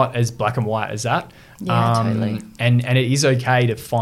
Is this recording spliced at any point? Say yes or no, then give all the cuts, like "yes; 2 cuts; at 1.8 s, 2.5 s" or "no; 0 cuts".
no; 0 cuts